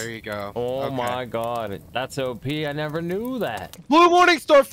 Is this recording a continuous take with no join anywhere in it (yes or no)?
no